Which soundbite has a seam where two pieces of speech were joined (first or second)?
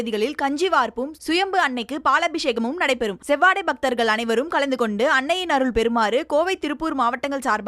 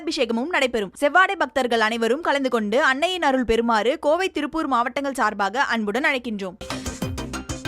second